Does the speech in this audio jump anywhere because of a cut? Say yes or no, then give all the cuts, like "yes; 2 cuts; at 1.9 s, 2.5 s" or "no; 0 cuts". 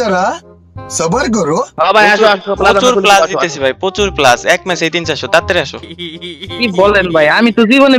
no; 0 cuts